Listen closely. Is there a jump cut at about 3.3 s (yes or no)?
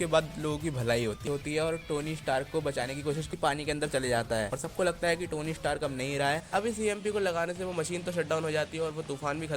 yes